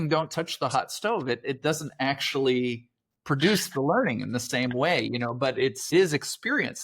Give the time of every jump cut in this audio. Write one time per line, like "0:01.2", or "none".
0:05.9